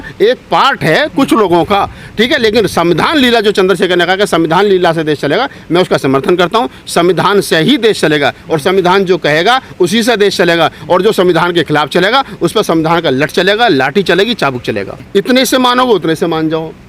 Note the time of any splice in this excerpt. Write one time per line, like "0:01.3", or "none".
0:14.9